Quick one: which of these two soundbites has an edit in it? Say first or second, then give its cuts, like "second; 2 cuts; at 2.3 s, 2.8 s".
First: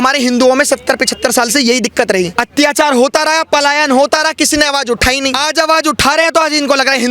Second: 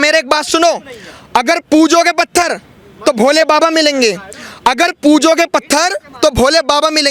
first; 2 cuts; at 2.3 s, 5.4 s